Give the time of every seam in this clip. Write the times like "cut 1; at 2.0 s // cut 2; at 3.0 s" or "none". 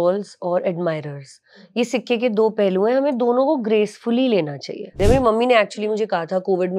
cut 1; at 5.0 s